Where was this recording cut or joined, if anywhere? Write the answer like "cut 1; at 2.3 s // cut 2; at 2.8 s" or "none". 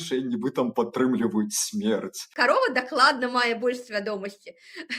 cut 1; at 2.3 s